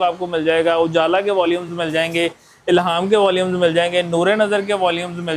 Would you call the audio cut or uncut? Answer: uncut